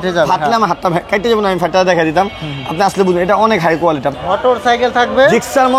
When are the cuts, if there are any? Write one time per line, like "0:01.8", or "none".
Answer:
0:04.1